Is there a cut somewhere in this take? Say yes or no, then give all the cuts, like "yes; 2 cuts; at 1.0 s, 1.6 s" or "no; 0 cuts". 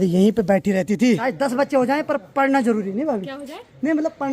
yes; 1 cut; at 1.2 s